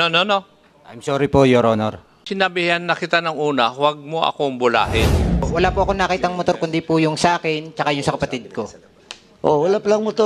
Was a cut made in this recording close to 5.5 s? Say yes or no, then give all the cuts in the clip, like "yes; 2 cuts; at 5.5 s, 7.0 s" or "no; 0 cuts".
yes; 2 cuts; at 2.1 s, 5.5 s